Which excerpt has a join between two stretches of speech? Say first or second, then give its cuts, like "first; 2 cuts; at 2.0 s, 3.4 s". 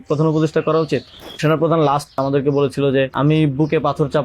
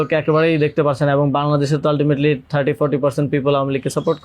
first; 3 cuts; at 1.4 s, 2.2 s, 3.1 s